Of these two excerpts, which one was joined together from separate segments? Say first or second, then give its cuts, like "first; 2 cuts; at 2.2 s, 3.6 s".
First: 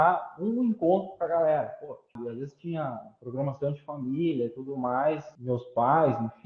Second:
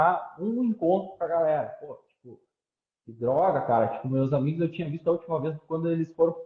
first; 2 cuts; at 2.2 s, 5.3 s